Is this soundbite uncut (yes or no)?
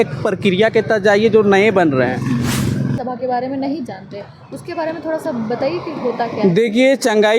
no